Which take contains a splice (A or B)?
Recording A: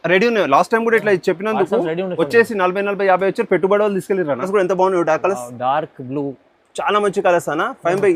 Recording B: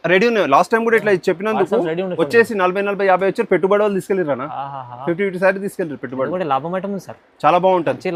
A